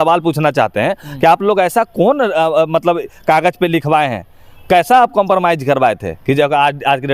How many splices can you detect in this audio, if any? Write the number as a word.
zero